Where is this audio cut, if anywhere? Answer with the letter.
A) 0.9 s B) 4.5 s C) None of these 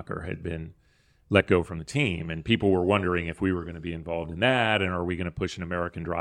C